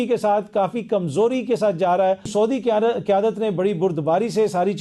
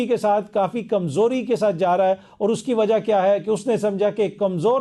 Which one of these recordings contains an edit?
first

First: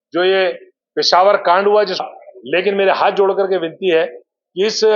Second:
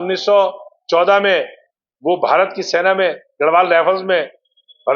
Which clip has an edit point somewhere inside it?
first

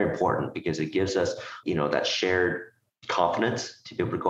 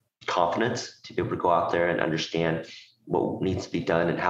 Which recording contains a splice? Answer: first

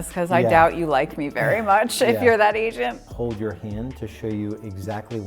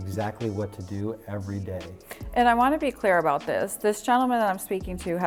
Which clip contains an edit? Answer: first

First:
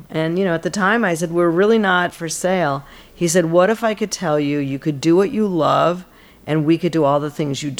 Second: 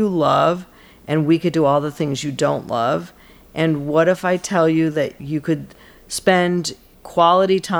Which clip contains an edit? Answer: first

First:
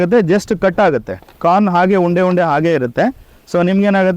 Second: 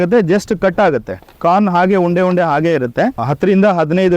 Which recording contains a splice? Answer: second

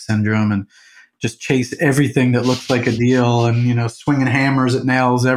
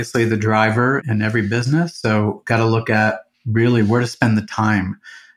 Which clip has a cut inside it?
second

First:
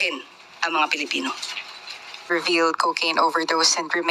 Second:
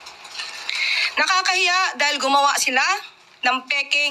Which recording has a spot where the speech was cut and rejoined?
first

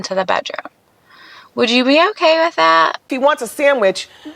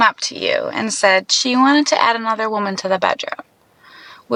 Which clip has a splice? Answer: first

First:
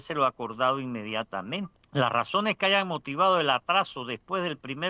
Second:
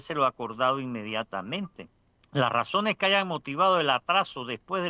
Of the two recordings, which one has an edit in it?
first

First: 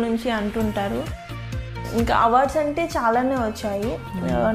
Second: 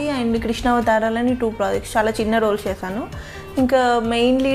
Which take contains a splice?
first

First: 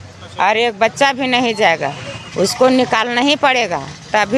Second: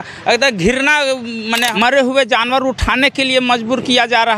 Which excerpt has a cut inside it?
second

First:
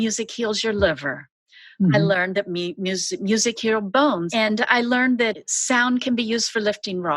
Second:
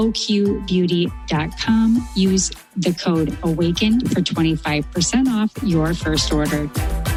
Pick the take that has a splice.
first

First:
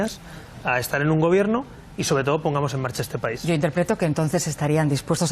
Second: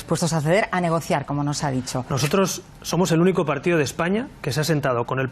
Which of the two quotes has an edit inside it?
first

